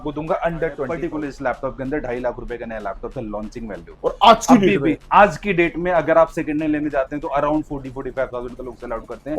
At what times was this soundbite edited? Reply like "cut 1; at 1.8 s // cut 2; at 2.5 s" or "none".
cut 1; at 0.9 s